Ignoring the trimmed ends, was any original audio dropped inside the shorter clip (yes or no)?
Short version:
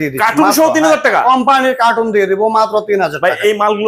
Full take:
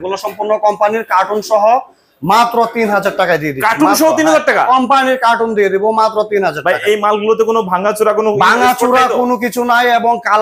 no